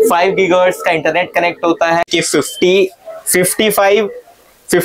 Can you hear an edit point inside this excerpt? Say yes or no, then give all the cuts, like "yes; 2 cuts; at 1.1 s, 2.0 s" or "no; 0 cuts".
yes; 1 cut; at 2.1 s